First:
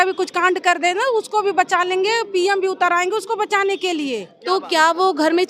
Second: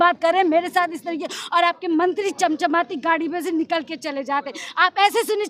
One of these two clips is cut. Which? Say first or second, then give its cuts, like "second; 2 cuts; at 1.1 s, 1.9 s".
first; 1 cut; at 4.3 s